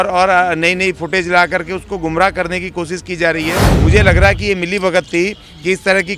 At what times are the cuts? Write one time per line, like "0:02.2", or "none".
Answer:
0:03.7